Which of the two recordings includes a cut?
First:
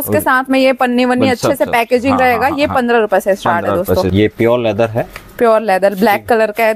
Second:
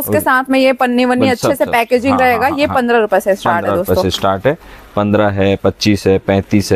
first; 1 cut; at 4.1 s

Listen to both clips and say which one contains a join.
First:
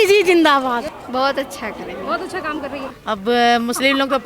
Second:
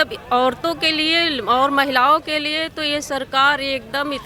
first; 2 cuts; at 0.9 s, 2.9 s

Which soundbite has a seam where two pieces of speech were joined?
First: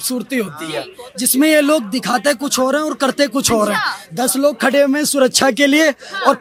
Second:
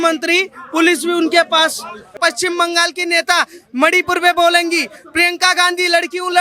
second; 1 cut; at 2.1 s

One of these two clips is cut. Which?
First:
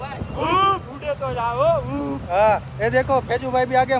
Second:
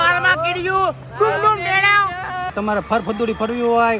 second; 1 cut; at 2.5 s

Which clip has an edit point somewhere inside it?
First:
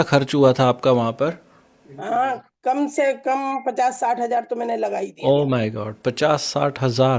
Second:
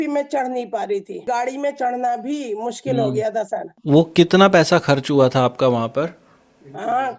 second; 2 cuts; at 1.2 s, 3.7 s

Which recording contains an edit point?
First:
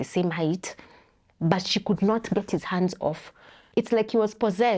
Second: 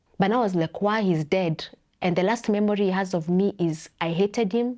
first; 1 cut; at 3.5 s

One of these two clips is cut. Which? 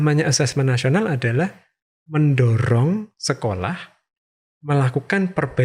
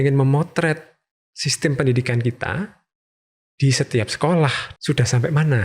second; 1 cut; at 4.6 s

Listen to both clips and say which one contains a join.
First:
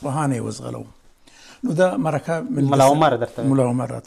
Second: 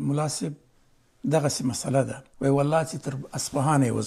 second; 1 cut; at 2.2 s

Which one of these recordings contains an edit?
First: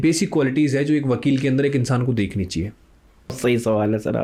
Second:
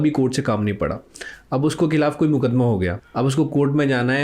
second; 1 cut; at 3.0 s

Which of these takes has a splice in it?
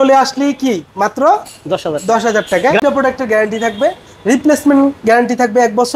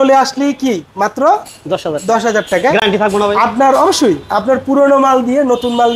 first; 1 cut; at 2.8 s

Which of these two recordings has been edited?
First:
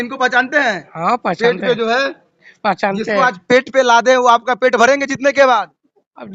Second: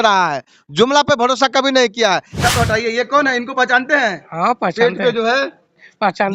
second; 1 cut; at 2.3 s

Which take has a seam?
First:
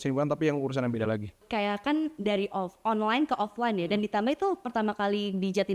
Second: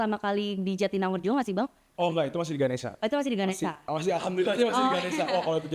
first; 1 cut; at 1.4 s

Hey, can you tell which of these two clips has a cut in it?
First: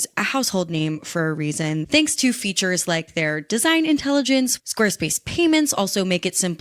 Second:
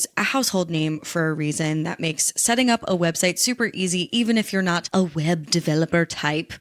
first; 2 cuts; at 1.8 s, 4.6 s

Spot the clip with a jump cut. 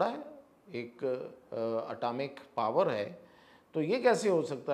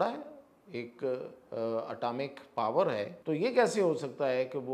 second; 1 cut; at 3.1 s

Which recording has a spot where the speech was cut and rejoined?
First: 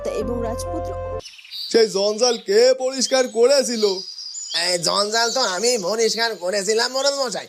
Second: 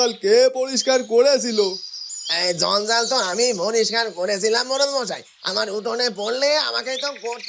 first; 1 cut; at 1.0 s

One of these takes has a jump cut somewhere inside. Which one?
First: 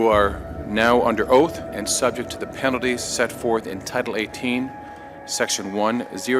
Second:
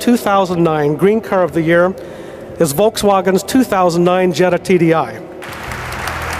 second; 1 cut; at 5.4 s

